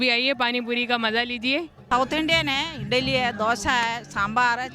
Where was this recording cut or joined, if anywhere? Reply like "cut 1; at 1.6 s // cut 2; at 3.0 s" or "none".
cut 1; at 1.8 s